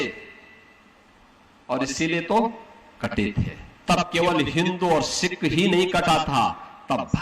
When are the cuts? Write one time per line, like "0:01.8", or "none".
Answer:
0:03.6